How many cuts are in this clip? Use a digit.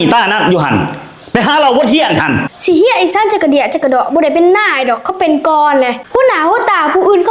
1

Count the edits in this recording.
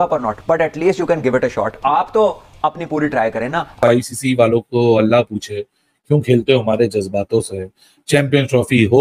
1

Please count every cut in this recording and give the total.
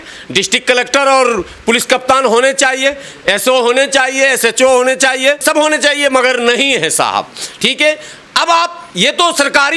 0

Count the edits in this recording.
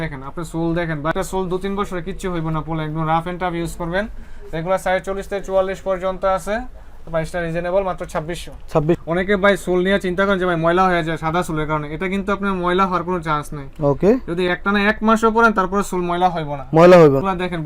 0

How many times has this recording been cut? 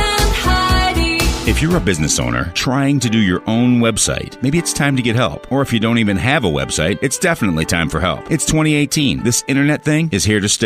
1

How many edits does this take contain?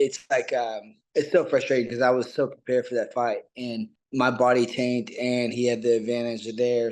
1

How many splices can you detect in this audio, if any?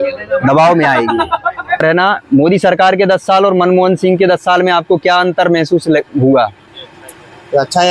1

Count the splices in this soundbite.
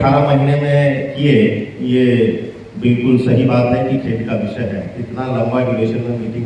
0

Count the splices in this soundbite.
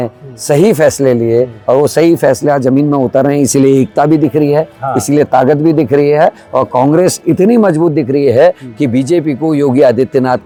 0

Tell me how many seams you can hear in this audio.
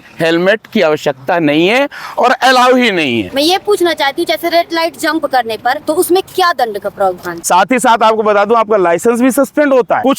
3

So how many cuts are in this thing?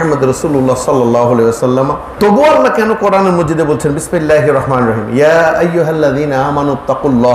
1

